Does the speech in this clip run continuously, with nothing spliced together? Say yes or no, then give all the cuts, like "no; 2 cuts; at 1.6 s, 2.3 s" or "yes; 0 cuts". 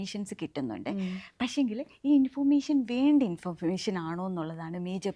yes; 0 cuts